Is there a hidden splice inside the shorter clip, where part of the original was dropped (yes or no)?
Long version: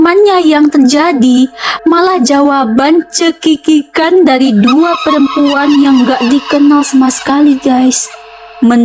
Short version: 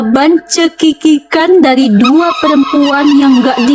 no